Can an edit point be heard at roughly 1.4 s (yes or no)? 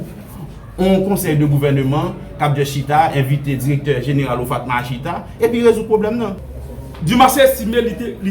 no